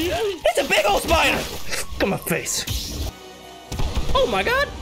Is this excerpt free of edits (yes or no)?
no